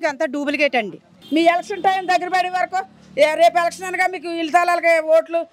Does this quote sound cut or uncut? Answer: cut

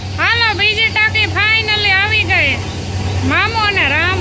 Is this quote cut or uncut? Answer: uncut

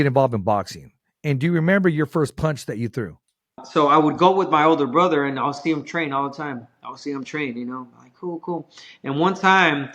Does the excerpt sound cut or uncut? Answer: cut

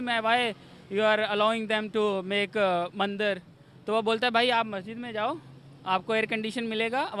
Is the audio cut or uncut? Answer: uncut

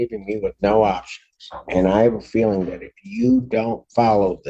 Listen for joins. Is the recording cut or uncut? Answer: uncut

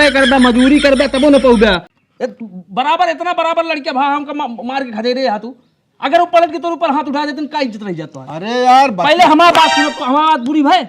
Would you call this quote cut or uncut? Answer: cut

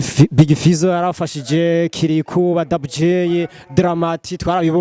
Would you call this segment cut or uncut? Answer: uncut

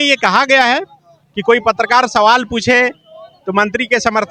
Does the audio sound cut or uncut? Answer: uncut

